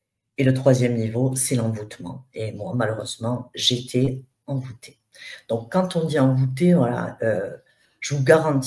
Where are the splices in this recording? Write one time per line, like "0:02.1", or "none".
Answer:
none